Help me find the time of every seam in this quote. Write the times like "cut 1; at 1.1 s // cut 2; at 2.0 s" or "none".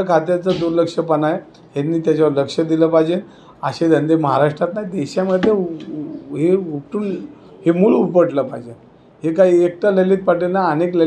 none